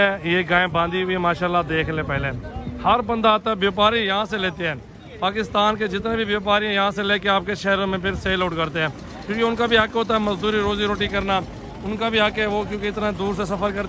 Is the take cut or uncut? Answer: uncut